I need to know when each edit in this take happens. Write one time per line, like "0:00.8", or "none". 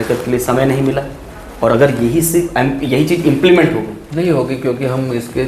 none